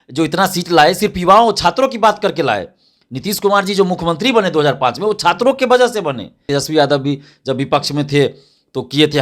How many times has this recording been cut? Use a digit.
1